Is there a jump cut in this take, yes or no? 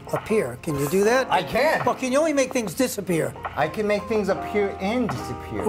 no